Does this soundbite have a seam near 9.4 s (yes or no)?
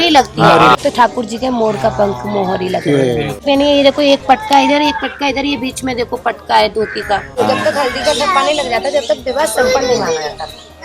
no